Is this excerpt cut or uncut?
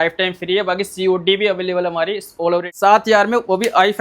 cut